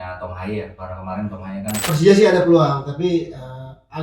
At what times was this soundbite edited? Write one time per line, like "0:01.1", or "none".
0:01.8